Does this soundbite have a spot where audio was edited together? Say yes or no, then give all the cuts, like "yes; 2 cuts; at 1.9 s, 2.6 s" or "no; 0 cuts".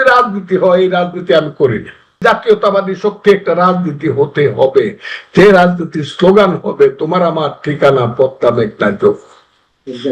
yes; 1 cut; at 2.2 s